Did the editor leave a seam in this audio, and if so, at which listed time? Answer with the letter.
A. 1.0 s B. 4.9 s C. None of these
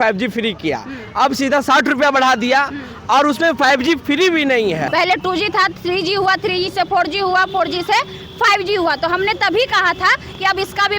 B